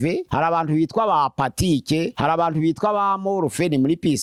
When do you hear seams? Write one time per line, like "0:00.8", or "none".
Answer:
none